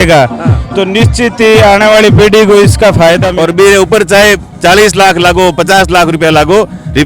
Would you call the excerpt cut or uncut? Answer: cut